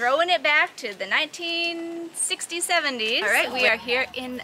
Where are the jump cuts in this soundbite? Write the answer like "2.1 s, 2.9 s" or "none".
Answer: 3.2 s